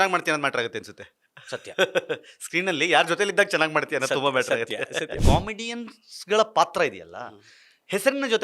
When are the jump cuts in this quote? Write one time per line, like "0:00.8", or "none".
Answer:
0:05.2